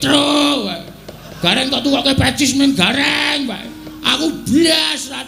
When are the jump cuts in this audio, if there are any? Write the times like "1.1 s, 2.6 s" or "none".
none